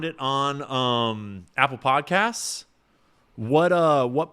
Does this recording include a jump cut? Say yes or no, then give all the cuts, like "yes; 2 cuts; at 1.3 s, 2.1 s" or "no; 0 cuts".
no; 0 cuts